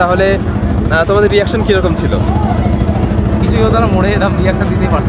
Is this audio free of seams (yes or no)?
yes